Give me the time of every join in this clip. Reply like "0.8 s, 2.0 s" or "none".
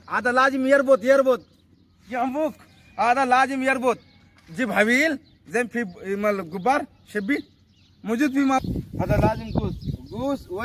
8.6 s